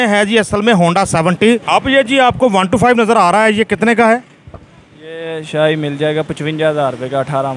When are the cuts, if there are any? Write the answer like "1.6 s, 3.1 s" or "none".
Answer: 1.6 s